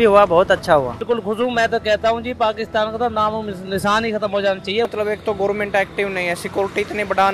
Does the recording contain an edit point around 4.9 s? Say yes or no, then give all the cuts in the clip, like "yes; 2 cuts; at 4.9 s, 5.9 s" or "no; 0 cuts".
yes; 2 cuts; at 1.0 s, 4.9 s